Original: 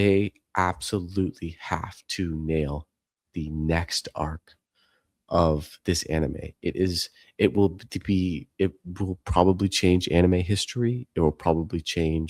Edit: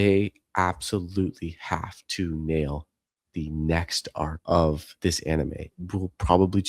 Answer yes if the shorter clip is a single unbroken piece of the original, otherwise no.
no